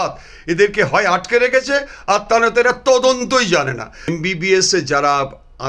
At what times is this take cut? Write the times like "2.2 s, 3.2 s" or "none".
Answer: 4.1 s